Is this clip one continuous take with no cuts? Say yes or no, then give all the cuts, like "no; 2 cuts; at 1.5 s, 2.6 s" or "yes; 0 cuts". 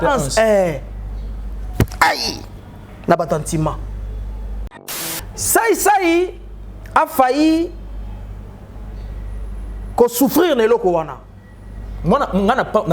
no; 1 cut; at 5.0 s